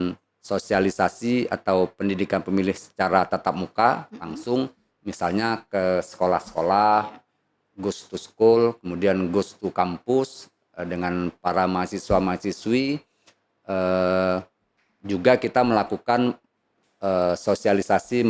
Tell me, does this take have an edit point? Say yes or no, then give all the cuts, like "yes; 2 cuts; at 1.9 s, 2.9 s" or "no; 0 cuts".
no; 0 cuts